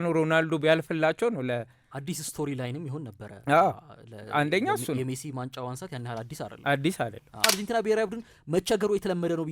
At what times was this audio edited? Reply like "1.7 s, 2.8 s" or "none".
7.4 s